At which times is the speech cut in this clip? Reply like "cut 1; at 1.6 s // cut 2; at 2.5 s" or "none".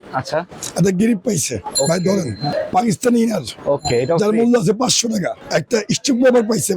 cut 1; at 2.5 s // cut 2; at 5.4 s